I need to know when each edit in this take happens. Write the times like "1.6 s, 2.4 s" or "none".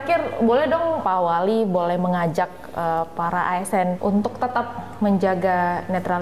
1.0 s, 4.0 s